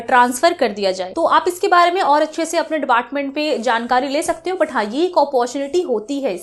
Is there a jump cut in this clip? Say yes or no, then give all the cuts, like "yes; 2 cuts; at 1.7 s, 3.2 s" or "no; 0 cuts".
no; 0 cuts